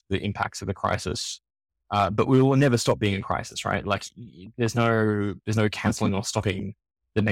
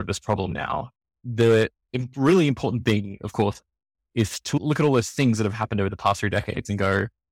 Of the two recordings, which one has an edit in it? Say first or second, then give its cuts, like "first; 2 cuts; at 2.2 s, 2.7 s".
second; 2 cuts; at 1.2 s, 4.6 s